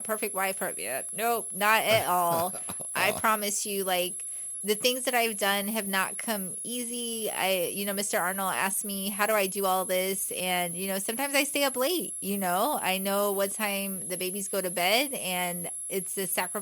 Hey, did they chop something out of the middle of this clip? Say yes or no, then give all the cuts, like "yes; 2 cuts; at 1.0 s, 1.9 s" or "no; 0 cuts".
no; 0 cuts